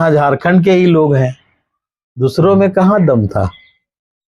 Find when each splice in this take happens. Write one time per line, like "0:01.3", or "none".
none